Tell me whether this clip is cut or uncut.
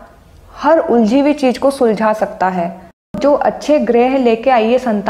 cut